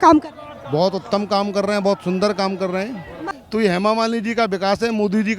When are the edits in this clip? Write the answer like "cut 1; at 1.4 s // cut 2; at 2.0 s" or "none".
cut 1; at 3.2 s